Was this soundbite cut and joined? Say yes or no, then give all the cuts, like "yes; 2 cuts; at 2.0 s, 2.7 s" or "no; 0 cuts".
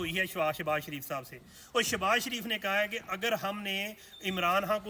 no; 0 cuts